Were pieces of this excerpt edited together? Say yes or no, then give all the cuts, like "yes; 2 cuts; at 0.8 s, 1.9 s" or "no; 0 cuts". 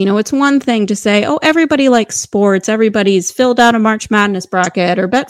no; 0 cuts